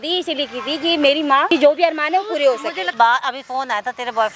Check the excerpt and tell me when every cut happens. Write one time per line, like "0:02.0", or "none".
0:01.5
0:02.9